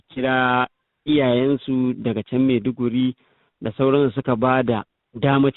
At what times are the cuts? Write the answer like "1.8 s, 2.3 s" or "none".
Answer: none